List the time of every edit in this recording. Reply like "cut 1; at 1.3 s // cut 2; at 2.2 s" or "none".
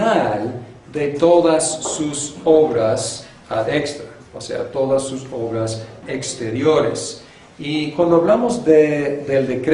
cut 1; at 6.3 s